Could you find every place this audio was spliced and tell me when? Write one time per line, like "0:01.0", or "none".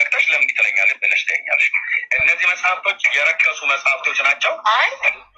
none